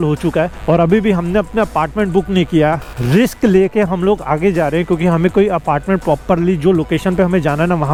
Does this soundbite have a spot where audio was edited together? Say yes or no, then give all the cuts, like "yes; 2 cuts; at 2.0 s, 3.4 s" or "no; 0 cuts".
no; 0 cuts